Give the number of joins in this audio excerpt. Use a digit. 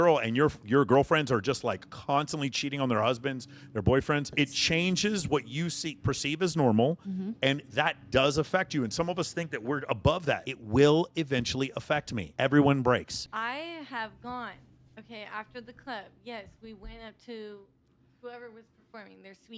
4